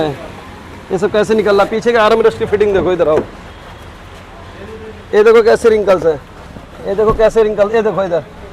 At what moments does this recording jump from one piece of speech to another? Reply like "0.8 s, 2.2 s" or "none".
none